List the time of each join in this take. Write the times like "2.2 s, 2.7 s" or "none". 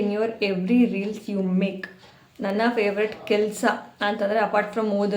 none